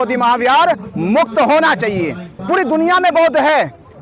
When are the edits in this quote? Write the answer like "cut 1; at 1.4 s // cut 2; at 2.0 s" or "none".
cut 1; at 2.3 s